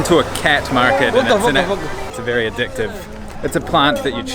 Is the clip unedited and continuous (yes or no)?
no